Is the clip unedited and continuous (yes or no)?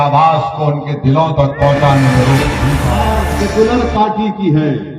no